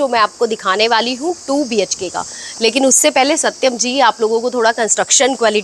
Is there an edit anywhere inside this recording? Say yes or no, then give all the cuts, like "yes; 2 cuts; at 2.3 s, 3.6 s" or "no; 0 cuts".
no; 0 cuts